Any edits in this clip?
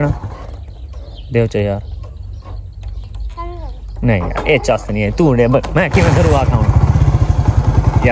no; 0 cuts

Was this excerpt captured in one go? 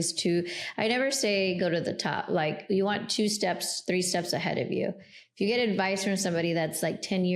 yes; 0 cuts

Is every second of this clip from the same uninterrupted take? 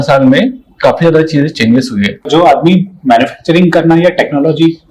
no; 1 cut; at 2.3 s

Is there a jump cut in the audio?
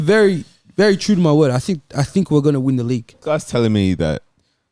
yes; 1 cut; at 3.1 s

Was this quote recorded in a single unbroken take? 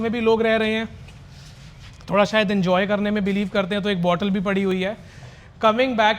yes; 0 cuts

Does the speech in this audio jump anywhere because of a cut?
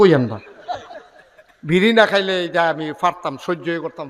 no; 0 cuts

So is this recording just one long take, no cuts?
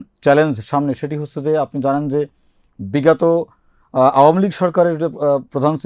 yes; 0 cuts

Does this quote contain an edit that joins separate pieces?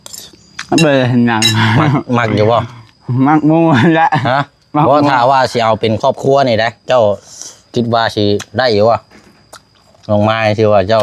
no; 0 cuts

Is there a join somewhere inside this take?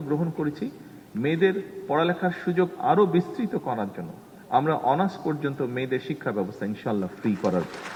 no; 0 cuts

